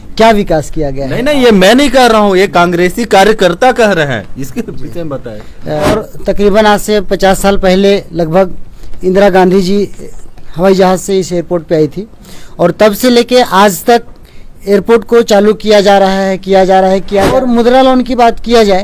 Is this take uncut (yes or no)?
no